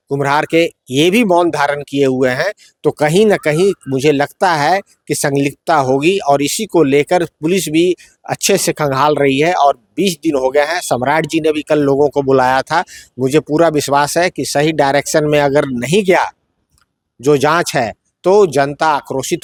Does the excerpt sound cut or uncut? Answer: uncut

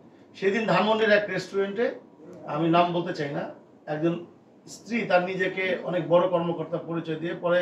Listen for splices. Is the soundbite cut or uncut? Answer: uncut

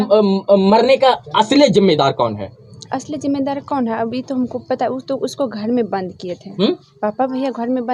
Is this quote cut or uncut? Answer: uncut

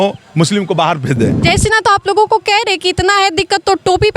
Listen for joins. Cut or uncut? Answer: cut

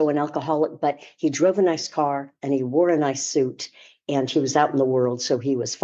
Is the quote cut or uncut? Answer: uncut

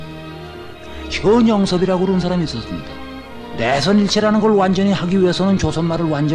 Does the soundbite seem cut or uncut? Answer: cut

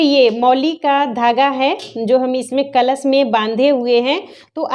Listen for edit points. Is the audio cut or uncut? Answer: uncut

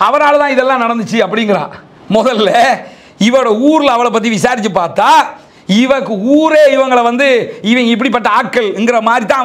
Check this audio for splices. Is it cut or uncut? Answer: uncut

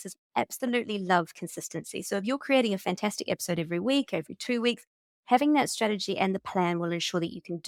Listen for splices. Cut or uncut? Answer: uncut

